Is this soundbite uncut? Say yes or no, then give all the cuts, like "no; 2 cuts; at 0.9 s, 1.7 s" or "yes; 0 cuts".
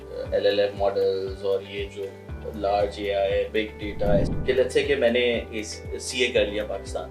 no; 1 cut; at 4.3 s